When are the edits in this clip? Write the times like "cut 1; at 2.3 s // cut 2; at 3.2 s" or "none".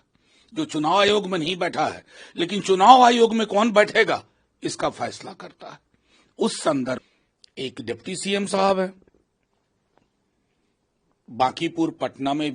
cut 1; at 7.0 s